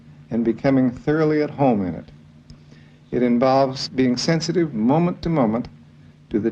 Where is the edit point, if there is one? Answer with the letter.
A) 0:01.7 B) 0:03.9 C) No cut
B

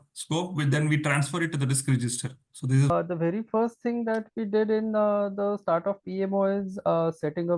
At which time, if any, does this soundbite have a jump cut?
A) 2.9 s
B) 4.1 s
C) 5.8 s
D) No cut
A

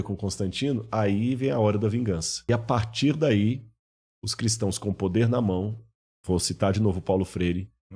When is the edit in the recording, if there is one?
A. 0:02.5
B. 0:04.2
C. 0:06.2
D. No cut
A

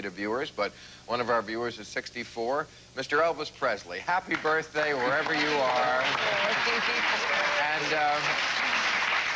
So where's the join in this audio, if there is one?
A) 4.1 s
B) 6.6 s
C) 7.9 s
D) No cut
C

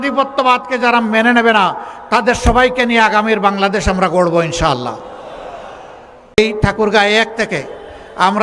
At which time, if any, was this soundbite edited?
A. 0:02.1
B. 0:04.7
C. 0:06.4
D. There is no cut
C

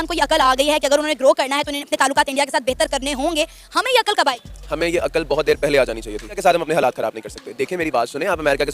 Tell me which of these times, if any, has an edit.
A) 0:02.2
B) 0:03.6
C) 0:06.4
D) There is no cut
C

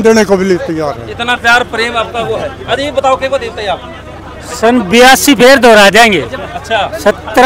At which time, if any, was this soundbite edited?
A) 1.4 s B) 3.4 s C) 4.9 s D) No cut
D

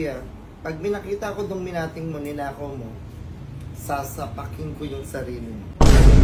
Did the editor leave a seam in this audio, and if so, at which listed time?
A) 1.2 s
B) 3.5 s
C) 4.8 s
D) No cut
D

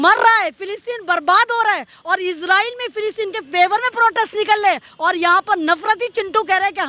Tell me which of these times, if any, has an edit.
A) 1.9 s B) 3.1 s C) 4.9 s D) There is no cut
D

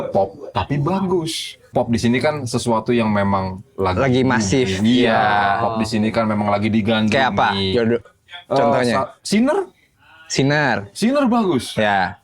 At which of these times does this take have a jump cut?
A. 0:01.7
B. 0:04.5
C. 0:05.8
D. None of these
A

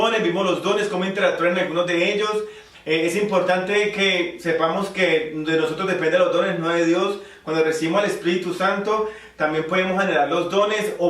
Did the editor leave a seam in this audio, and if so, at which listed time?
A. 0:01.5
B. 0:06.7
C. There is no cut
B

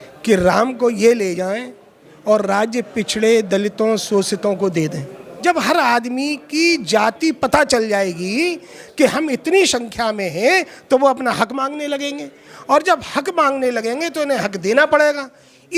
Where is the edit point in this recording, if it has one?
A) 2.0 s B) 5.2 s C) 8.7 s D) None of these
B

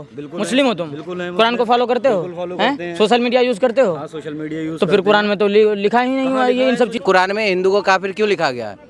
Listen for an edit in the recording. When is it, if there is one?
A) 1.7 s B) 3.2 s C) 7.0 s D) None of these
C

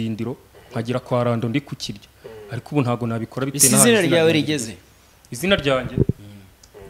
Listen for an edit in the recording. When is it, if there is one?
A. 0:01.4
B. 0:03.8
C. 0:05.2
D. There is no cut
D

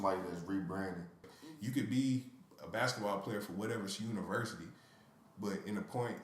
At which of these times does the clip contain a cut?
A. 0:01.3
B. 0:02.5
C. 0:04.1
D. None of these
A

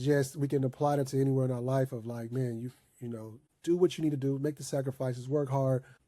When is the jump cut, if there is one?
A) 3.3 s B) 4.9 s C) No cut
C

